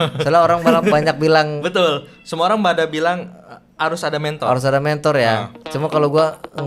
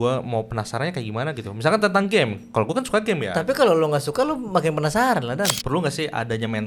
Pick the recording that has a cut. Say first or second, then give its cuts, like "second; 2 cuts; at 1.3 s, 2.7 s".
second; 1 cut; at 5.6 s